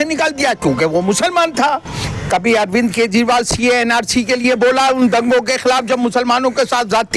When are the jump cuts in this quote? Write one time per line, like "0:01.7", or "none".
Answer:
0:02.0